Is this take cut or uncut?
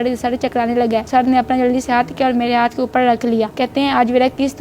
cut